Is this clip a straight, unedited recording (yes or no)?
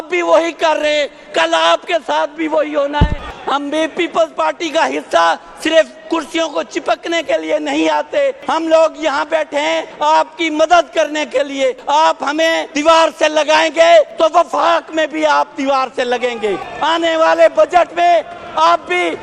no